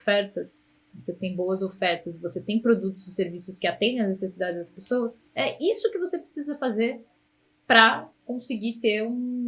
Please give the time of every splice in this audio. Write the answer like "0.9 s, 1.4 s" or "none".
5.3 s